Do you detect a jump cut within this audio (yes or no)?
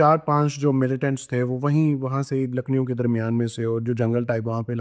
no